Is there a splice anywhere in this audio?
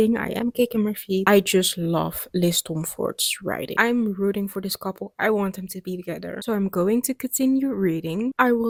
no; 0 cuts

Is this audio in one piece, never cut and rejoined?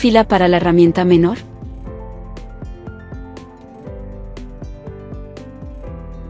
no; 2 cuts; at 1.4 s, 5.1 s

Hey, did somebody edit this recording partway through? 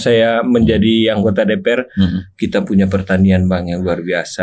no; 0 cuts

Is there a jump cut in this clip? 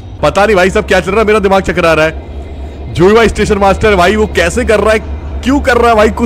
no; 0 cuts

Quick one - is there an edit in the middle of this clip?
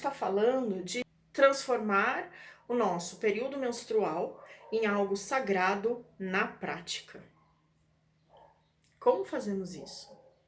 yes; 1 cut; at 1.0 s

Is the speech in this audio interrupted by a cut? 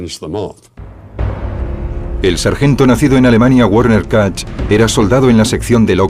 no; 0 cuts

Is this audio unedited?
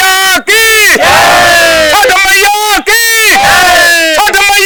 yes; 0 cuts

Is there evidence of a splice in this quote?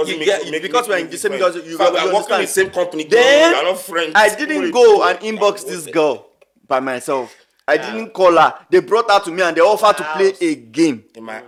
no; 0 cuts

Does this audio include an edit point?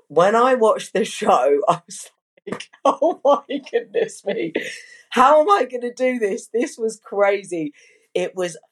no; 0 cuts

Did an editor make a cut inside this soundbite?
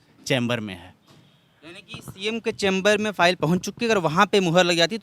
no; 0 cuts

